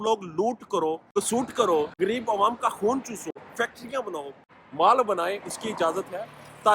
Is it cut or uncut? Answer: cut